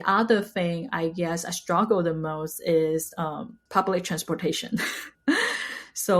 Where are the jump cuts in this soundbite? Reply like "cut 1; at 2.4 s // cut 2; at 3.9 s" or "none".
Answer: cut 1; at 3.6 s